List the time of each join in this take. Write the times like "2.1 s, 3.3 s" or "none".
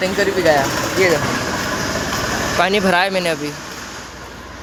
none